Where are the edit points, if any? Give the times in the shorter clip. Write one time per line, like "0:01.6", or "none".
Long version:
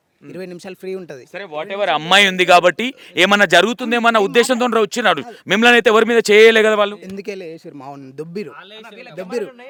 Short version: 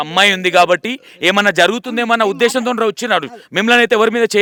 none